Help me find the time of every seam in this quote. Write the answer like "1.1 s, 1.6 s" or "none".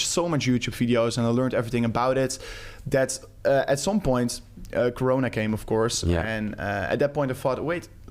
none

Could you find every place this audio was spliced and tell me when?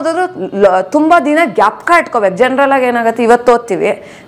none

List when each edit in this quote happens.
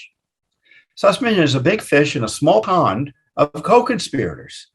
2.7 s

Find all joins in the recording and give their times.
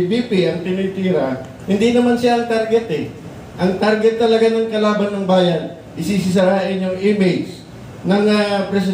none

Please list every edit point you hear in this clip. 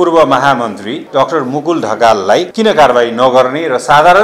0.9 s, 2.5 s

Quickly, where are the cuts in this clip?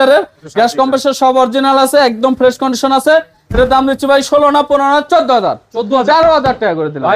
none

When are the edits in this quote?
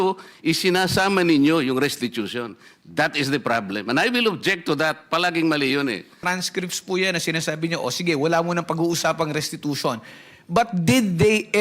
6.2 s

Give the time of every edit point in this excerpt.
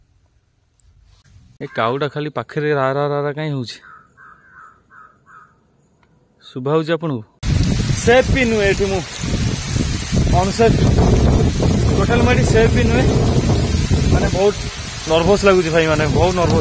1.6 s, 7.4 s

